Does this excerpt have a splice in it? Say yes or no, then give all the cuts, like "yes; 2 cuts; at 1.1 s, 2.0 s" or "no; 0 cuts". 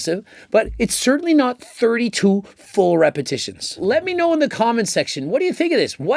yes; 1 cut; at 3.8 s